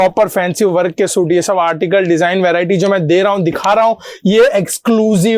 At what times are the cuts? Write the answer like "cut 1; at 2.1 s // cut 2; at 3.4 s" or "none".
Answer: none